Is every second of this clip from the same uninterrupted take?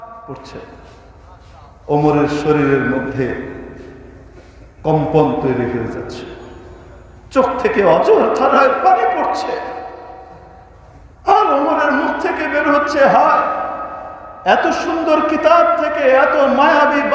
yes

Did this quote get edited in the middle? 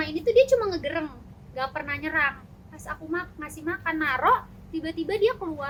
no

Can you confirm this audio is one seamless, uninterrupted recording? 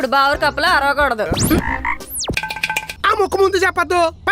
no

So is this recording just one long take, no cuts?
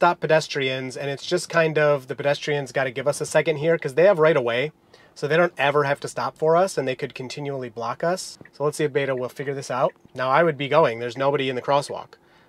no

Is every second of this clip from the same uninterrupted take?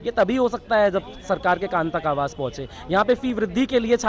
yes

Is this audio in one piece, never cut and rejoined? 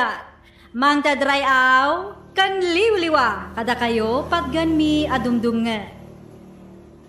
no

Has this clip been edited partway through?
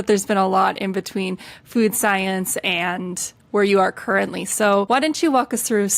yes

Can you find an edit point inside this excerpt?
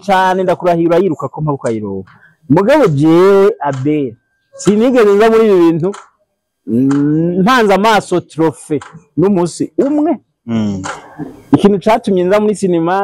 no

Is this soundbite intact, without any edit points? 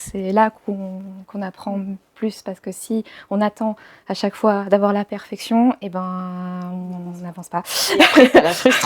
yes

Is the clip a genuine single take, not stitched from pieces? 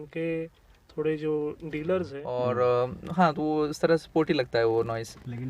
no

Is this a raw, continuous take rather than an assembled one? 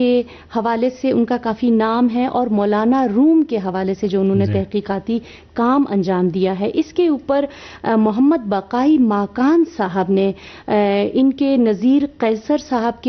yes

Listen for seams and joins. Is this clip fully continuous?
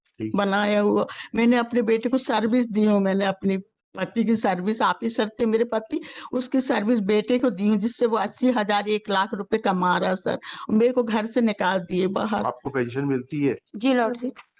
yes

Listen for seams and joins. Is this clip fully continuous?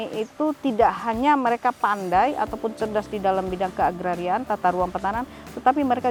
yes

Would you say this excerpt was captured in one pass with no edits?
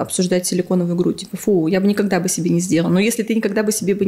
yes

